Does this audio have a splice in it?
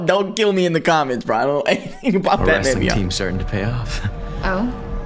no; 0 cuts

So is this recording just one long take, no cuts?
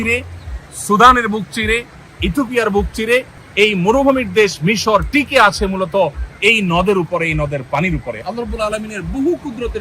no; 1 cut; at 3.4 s

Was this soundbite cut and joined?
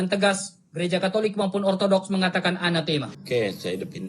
yes; 1 cut; at 3.2 s

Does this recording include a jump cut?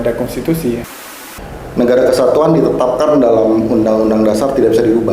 yes; 1 cut; at 1.0 s

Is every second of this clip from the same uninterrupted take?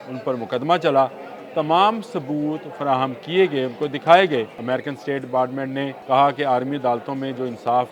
no; 2 cuts; at 4.6 s, 6.0 s

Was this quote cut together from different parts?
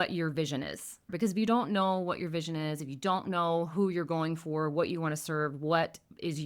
yes; 1 cut; at 1.0 s

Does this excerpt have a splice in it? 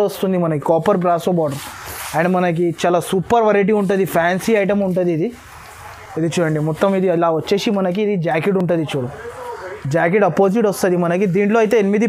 no; 0 cuts

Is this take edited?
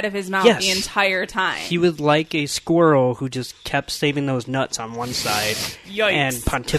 no; 0 cuts

